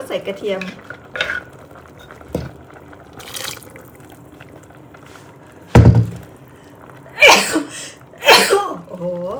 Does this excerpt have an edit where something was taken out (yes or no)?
no